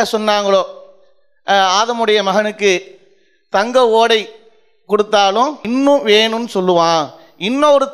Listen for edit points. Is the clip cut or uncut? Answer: cut